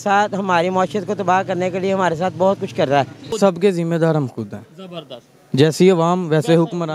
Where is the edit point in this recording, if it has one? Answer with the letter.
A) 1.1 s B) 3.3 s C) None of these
B